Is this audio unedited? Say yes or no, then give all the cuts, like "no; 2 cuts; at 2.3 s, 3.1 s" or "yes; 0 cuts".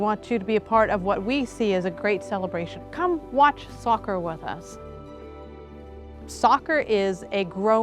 yes; 0 cuts